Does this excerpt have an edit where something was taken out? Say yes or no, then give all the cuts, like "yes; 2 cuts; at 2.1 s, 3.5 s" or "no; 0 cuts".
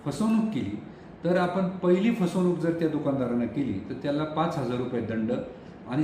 no; 0 cuts